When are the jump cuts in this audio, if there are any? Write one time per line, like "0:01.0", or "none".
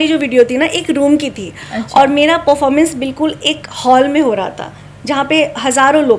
none